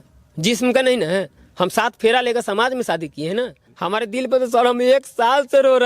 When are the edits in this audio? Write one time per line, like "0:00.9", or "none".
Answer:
0:03.6

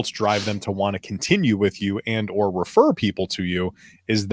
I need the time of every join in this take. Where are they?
none

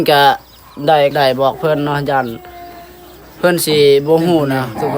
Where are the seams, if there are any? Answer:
0:01.1

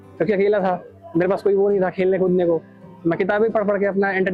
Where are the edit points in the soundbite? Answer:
none

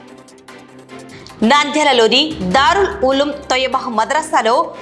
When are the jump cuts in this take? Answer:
0:01.1

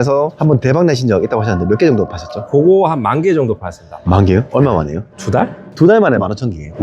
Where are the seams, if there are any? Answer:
none

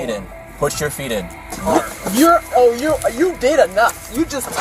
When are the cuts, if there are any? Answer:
0:01.5

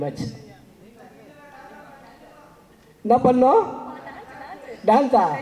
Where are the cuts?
none

